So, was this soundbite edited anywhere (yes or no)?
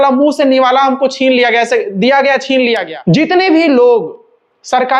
yes